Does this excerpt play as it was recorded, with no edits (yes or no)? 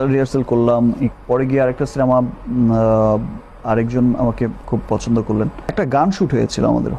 no